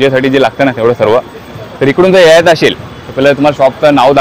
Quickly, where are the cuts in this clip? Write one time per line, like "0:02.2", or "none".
none